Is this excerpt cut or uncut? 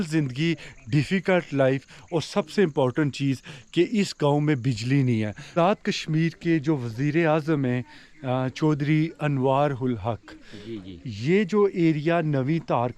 cut